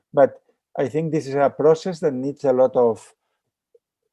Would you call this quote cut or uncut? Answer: uncut